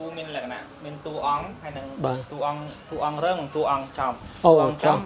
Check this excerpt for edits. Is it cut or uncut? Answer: uncut